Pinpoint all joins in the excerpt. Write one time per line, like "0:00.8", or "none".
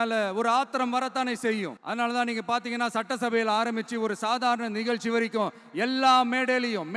0:01.8